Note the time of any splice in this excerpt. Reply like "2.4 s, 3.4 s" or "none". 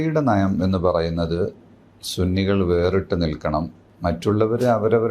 3.8 s

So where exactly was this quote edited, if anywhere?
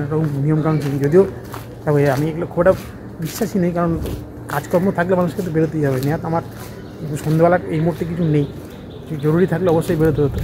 none

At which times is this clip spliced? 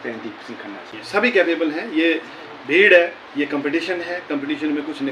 0.9 s

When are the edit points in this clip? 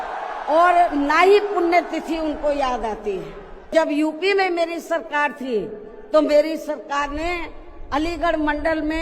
3.7 s

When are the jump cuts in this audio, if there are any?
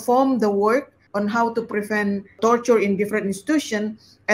1.0 s, 2.4 s

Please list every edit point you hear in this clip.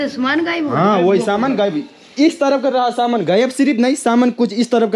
none

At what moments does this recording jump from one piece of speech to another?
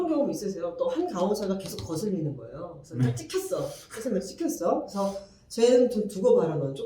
none

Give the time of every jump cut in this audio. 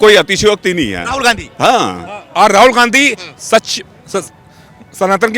2.2 s

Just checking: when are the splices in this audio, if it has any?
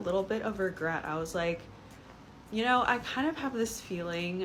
none

